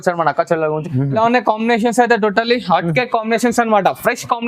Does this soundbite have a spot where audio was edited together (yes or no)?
yes